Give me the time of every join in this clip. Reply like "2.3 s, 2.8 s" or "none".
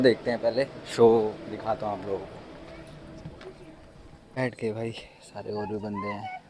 none